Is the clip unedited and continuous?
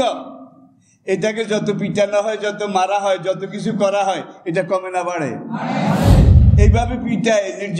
no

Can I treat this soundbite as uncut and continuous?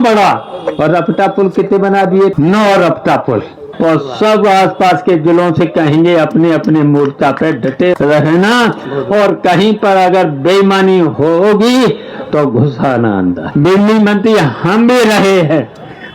no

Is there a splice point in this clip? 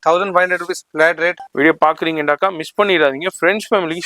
yes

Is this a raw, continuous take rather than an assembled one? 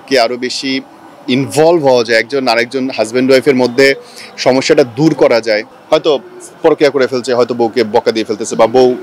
no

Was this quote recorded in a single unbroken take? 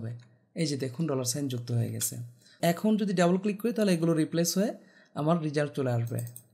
no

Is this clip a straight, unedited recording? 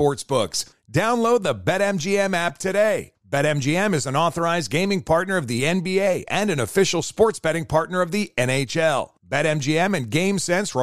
yes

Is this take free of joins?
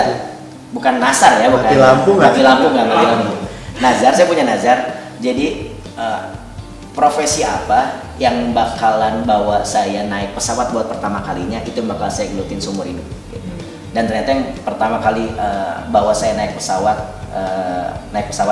yes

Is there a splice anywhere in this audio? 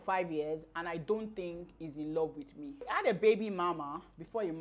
yes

